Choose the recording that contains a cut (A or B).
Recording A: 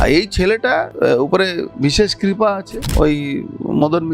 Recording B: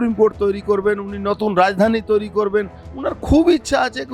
A